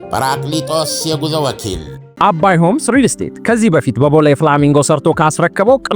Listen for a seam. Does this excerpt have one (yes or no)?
yes